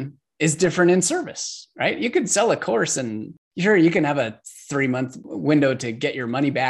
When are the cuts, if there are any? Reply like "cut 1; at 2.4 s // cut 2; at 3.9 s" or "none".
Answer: cut 1; at 5.2 s